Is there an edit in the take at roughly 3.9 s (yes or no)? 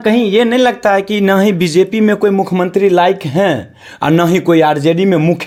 no